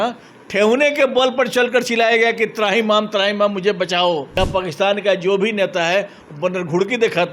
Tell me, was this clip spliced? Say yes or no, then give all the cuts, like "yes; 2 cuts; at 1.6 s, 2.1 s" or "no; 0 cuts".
yes; 1 cut; at 4.4 s